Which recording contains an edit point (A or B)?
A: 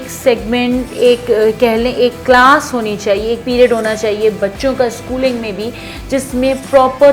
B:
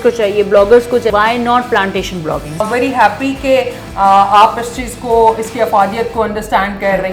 B